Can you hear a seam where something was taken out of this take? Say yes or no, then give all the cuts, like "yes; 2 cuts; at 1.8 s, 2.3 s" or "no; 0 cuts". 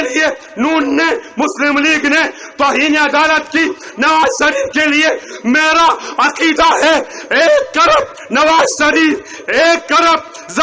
no; 0 cuts